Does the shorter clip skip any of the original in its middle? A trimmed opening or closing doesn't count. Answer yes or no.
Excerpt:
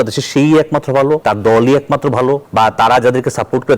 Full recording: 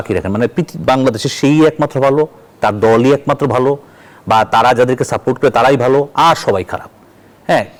yes